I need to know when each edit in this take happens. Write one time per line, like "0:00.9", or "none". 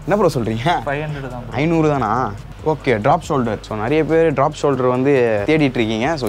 0:02.4
0:03.7
0:05.4